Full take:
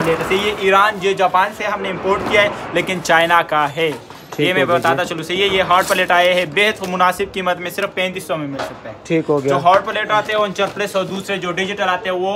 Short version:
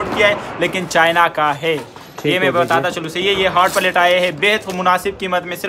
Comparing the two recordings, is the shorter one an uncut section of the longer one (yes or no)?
yes